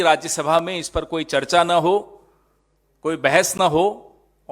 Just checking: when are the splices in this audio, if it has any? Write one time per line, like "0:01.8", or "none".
none